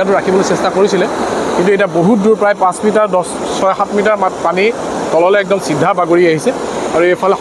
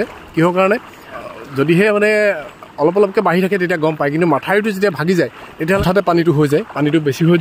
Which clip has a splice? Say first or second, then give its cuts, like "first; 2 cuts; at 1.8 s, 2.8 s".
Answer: second; 2 cuts; at 1.2 s, 5.8 s